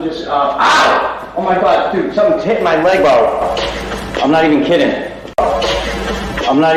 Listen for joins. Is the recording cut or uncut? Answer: uncut